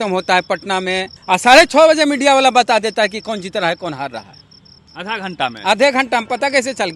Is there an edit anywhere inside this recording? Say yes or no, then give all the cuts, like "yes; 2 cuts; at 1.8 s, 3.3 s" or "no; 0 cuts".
yes; 1 cut; at 1.1 s